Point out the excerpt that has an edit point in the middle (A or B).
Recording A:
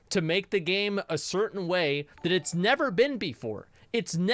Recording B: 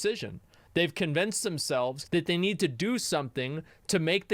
B